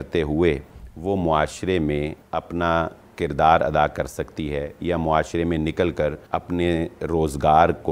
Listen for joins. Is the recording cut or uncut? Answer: cut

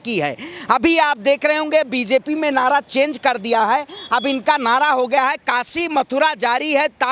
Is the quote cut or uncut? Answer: uncut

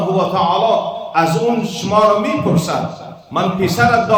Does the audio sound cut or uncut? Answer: uncut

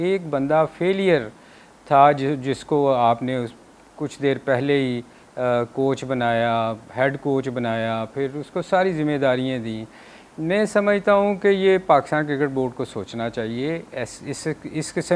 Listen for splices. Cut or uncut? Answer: uncut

